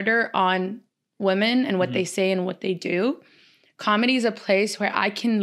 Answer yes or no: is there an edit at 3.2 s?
no